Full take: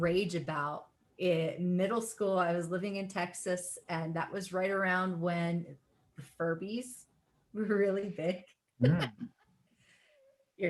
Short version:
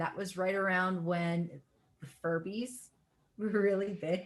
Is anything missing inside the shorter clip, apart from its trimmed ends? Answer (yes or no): no